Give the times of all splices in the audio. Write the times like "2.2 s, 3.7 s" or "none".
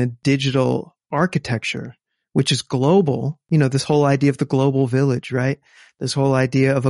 1.0 s